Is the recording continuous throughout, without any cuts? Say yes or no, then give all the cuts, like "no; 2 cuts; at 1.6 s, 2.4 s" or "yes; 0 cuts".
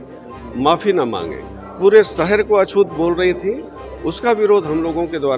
yes; 0 cuts